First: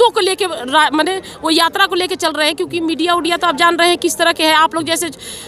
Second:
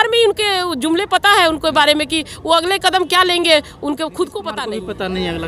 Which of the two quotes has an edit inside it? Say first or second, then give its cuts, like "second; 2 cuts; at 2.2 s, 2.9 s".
second; 1 cut; at 4.5 s